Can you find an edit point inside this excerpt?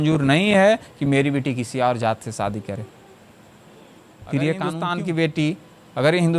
yes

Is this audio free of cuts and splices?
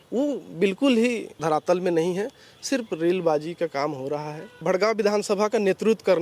no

